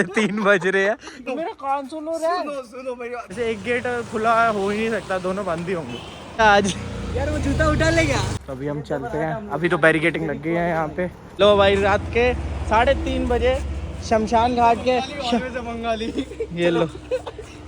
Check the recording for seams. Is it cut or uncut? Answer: cut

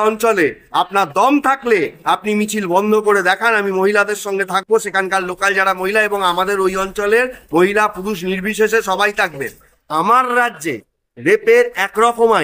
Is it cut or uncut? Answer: cut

